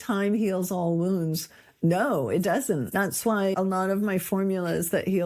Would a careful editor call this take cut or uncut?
cut